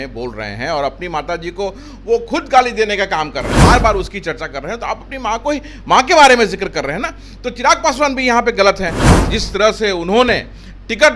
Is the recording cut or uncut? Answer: cut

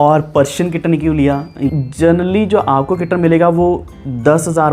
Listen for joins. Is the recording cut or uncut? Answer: cut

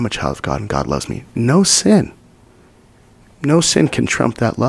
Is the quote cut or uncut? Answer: cut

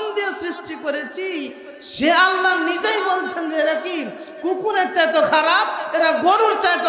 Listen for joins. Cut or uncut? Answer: uncut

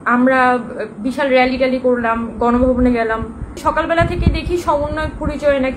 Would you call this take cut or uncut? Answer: cut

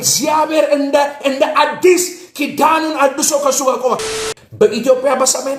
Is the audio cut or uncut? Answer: cut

